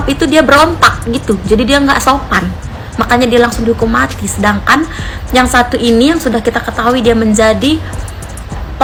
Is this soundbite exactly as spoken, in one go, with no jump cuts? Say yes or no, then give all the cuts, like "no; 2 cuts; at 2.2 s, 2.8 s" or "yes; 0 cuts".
yes; 0 cuts